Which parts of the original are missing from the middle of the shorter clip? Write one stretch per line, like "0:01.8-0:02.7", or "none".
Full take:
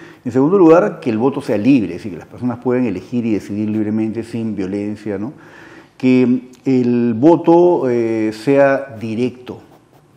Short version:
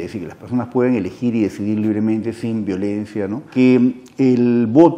0:05.4-0:05.9